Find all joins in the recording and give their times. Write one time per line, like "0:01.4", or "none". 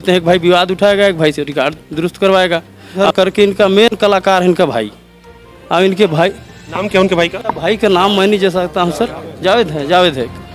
0:03.0